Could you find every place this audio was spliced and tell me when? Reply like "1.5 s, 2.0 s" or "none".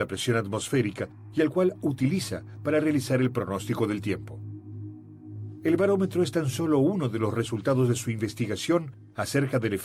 none